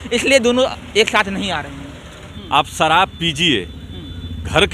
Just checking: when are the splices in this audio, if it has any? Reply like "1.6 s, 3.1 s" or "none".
2.3 s